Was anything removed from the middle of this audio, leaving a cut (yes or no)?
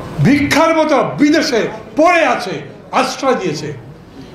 no